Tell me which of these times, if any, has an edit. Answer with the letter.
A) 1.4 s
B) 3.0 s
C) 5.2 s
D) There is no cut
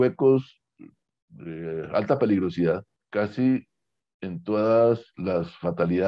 B